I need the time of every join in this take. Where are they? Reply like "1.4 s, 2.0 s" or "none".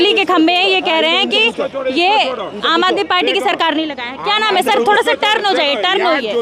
none